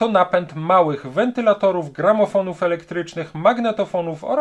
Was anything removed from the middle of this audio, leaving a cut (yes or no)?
no